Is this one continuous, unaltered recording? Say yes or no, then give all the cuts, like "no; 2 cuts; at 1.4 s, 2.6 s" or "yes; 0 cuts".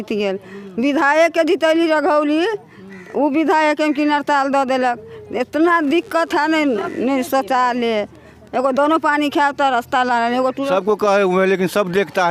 no; 1 cut; at 10.6 s